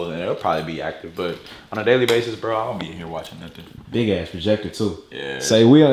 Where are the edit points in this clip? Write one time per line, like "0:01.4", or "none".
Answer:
none